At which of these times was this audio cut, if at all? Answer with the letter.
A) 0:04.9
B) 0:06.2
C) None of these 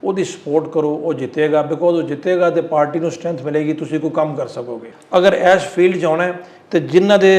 A